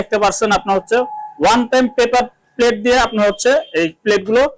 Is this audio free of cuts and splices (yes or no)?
yes